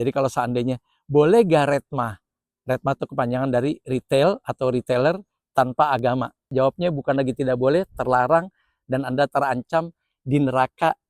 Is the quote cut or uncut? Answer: cut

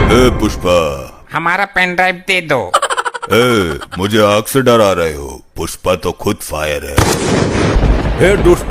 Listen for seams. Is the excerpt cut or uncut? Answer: cut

